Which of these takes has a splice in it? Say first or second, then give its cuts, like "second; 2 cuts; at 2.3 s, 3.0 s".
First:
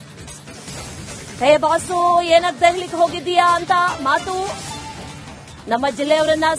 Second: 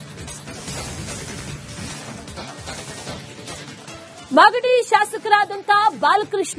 second; 1 cut; at 1.4 s